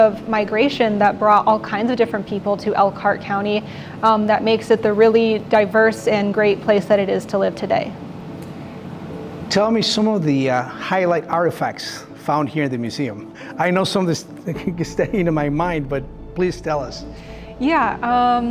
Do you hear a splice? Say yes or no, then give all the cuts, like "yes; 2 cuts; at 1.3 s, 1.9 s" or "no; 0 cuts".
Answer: no; 0 cuts